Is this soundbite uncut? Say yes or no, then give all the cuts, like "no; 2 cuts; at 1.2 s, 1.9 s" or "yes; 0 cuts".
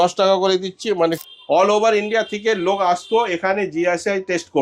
no; 1 cut; at 1.2 s